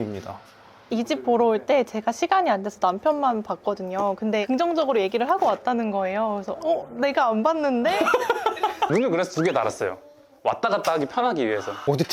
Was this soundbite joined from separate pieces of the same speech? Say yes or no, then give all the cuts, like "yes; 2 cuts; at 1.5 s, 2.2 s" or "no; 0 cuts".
yes; 1 cut; at 8.9 s